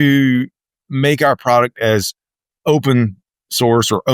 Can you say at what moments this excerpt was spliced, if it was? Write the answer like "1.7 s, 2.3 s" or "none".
none

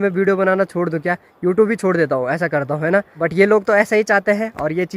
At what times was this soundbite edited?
none

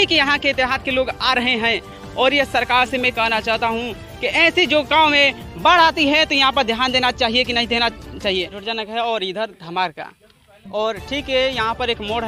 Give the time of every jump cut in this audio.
8.6 s

